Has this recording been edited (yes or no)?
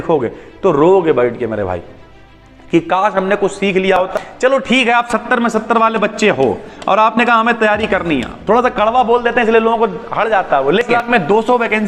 yes